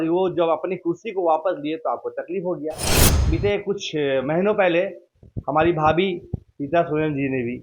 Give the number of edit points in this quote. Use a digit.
1